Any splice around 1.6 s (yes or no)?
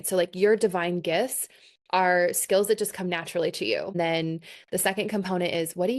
no